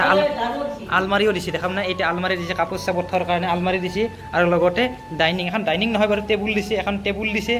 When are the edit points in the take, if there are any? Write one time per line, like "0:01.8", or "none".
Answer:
none